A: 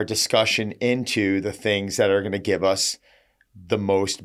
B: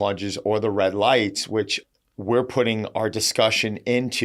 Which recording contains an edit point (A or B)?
B